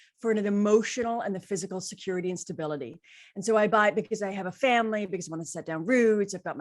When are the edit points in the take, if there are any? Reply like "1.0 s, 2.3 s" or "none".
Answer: none